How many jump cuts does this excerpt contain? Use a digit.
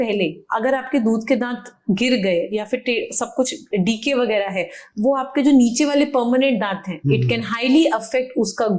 0